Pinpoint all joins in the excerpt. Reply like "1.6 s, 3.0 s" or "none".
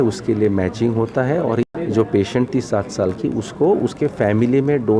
1.6 s